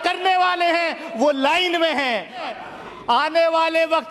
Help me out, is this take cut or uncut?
cut